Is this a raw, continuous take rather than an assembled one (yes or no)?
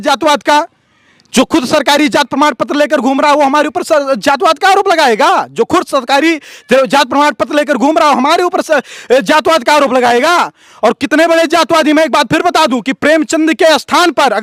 yes